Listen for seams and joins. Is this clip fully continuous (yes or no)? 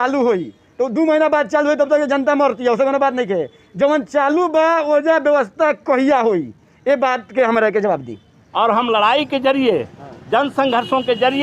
no